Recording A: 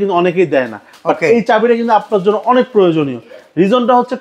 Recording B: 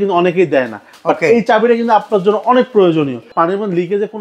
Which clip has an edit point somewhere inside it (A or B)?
B